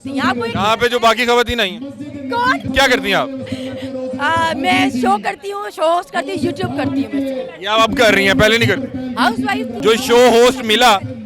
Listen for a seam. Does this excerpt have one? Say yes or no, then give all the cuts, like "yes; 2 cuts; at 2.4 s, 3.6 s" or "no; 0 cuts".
yes; 2 cuts; at 2.6 s, 9.8 s